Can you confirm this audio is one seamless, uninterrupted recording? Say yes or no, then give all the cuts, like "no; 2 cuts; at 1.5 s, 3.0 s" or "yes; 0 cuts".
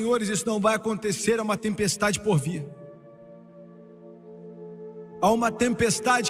yes; 0 cuts